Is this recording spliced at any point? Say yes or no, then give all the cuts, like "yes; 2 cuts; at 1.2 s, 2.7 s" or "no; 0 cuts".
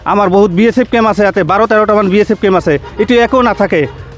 no; 0 cuts